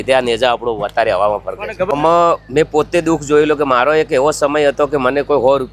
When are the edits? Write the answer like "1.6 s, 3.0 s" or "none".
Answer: 1.9 s